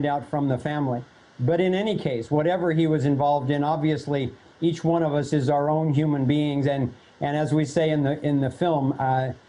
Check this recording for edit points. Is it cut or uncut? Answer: cut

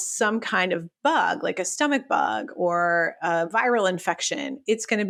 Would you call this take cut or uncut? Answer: uncut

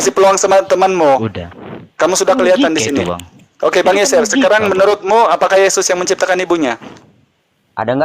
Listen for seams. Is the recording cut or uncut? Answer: uncut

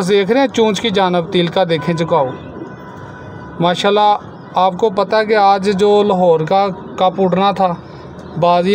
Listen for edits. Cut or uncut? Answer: uncut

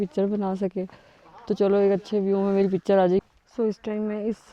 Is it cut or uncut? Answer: cut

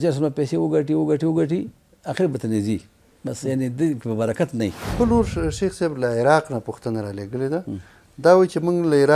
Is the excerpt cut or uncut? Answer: cut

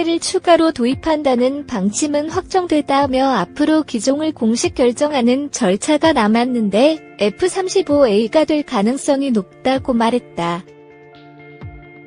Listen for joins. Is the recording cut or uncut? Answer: uncut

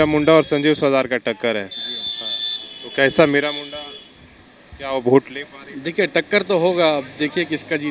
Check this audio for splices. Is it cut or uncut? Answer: uncut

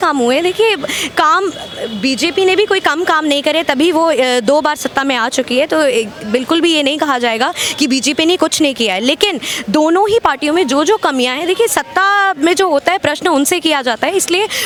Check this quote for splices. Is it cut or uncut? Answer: uncut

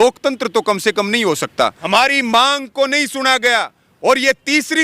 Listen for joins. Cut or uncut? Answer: cut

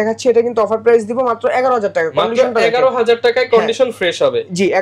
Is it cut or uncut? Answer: uncut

